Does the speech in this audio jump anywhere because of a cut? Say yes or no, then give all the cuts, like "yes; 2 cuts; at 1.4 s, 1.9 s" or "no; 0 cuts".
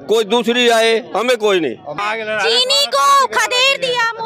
yes; 1 cut; at 1.9 s